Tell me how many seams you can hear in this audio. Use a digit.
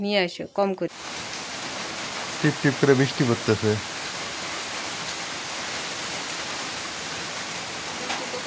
1